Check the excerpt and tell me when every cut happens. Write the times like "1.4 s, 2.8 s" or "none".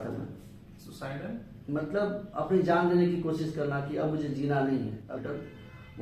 5.1 s